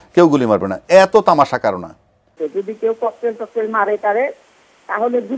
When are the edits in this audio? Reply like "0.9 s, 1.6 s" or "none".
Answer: 2.3 s